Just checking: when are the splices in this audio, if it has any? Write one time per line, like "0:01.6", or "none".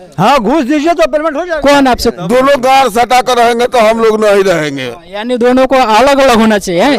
0:02.1